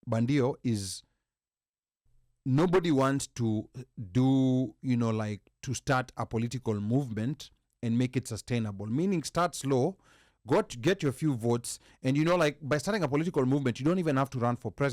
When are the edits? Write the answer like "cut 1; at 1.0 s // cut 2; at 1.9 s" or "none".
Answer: none